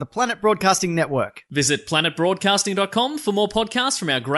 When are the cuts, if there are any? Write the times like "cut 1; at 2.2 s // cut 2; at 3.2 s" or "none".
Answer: none